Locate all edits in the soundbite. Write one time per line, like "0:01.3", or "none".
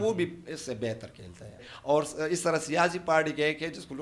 0:01.6